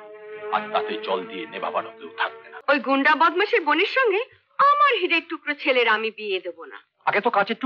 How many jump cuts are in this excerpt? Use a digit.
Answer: 1